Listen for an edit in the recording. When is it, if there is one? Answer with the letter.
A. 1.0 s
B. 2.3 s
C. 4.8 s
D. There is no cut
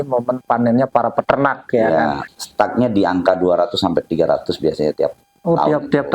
B